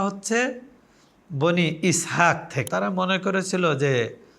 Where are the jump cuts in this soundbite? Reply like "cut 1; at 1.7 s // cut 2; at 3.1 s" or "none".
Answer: cut 1; at 2.7 s